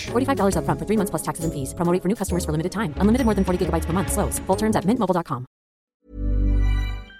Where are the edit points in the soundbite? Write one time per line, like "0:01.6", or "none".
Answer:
0:05.9